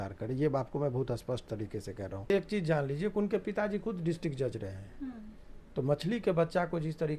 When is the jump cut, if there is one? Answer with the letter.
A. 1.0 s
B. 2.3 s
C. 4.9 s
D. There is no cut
B